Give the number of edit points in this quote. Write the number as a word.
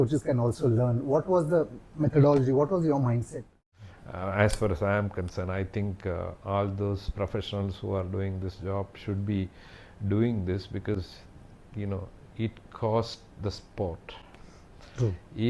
one